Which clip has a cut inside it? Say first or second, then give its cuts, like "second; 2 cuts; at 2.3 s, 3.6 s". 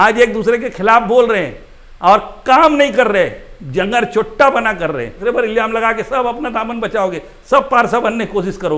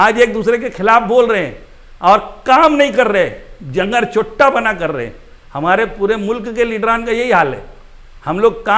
first; 1 cut; at 5.2 s